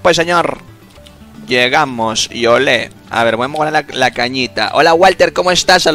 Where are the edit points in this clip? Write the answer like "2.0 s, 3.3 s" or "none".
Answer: 3.0 s